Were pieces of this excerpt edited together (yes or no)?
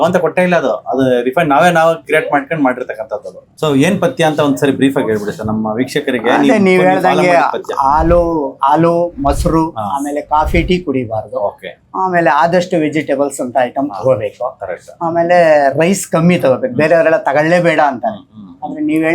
yes